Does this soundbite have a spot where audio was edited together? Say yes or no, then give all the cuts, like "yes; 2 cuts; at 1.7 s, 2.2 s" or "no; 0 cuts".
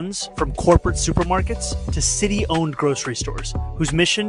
yes; 1 cut; at 1.3 s